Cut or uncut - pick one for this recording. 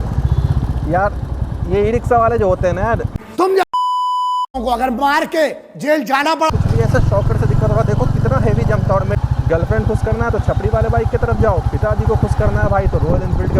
cut